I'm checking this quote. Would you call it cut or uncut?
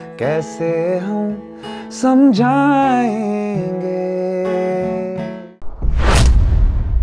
cut